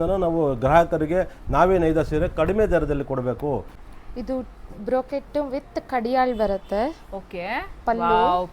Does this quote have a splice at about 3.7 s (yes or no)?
yes